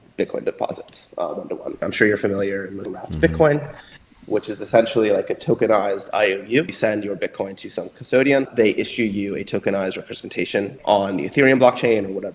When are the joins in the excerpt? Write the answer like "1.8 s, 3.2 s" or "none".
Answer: 1.8 s, 2.9 s, 6.7 s, 8.5 s, 10.8 s